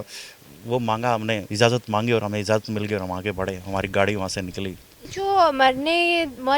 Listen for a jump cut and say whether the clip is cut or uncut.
cut